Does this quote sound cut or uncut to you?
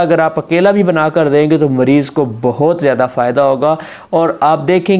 uncut